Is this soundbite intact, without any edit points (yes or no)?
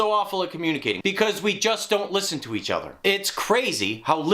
no